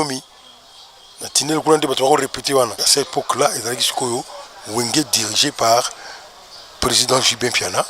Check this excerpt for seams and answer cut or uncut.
cut